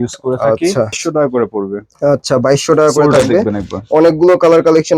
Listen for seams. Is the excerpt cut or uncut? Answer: cut